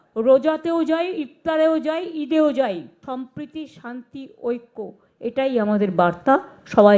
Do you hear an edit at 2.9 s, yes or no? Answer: yes